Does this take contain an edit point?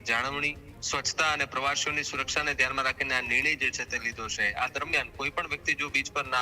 yes; 1 cut; at 4.5 s

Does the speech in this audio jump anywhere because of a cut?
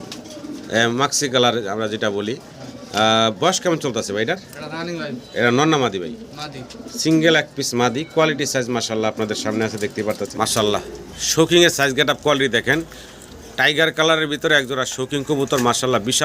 yes; 1 cut; at 10.3 s

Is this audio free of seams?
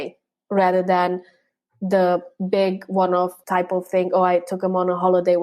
no; 1 cut; at 3.4 s

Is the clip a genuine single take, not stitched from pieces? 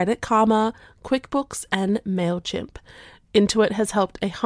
yes; 0 cuts

